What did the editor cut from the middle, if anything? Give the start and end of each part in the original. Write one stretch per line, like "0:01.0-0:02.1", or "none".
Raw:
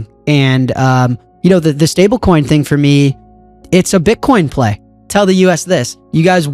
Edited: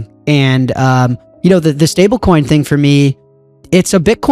none